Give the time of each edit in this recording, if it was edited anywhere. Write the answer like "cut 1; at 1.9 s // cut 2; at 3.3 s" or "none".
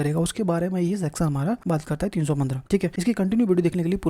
cut 1; at 1.6 s // cut 2; at 2.8 s

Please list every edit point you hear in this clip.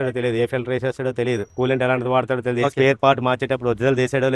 none

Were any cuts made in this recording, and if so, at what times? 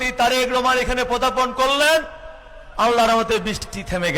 cut 1; at 2.7 s

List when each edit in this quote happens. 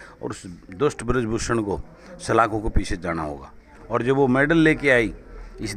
cut 1; at 3.7 s

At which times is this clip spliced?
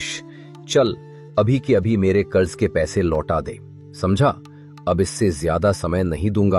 none

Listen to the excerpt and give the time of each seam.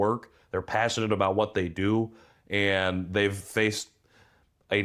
none

